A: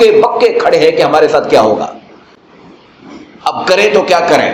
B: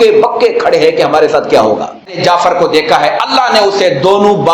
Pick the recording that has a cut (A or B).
B